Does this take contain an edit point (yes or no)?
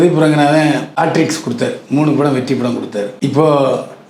yes